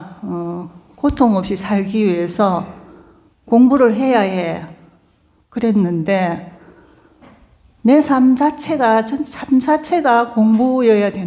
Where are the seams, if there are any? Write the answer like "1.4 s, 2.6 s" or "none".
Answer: none